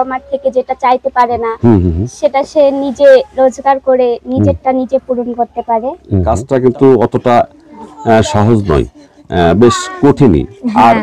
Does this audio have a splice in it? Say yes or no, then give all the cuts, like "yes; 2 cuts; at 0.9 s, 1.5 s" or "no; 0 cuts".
yes; 1 cut; at 6.1 s